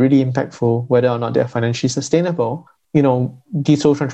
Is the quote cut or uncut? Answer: cut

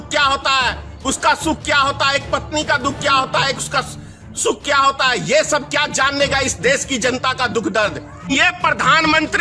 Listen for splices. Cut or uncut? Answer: cut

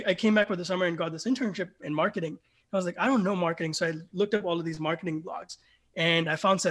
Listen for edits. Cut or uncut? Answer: uncut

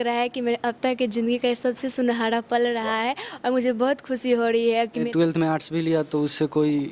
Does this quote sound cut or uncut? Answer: cut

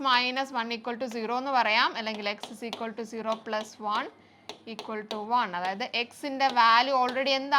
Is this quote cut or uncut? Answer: uncut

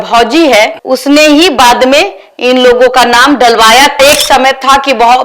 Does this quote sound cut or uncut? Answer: cut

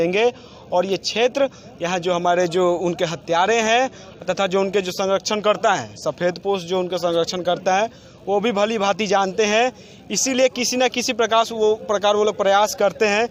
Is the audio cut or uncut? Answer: uncut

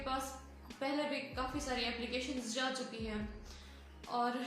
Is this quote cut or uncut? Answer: uncut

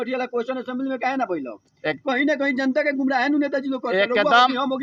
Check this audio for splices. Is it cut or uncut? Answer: uncut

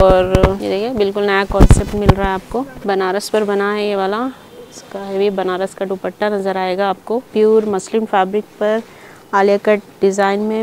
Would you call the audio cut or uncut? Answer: cut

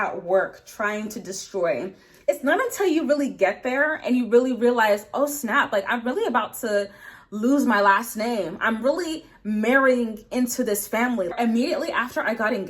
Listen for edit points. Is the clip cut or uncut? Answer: cut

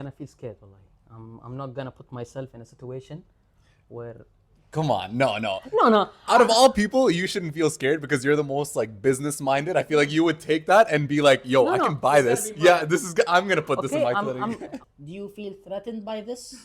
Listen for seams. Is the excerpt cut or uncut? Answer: cut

